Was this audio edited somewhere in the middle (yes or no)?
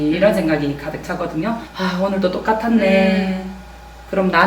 yes